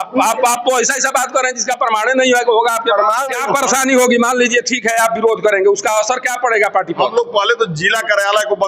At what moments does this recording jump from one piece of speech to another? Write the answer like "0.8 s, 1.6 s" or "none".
3.2 s